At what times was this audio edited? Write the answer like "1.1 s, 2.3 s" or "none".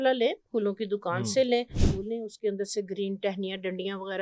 1.9 s